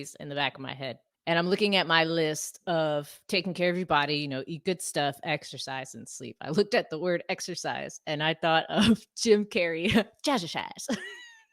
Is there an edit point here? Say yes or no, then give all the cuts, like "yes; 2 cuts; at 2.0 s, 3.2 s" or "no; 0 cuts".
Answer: yes; 1 cut; at 1.1 s